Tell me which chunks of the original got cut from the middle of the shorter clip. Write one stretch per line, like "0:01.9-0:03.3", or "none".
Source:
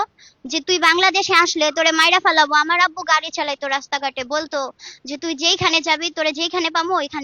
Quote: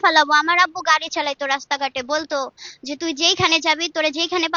none